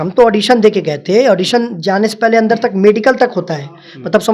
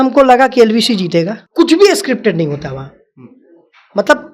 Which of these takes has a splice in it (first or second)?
second